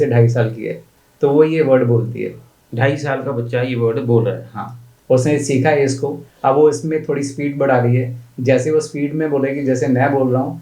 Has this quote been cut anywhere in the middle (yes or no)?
no